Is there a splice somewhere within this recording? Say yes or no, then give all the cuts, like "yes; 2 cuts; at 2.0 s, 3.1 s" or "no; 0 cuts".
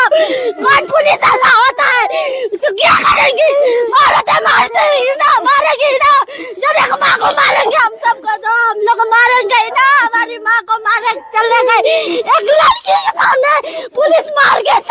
no; 0 cuts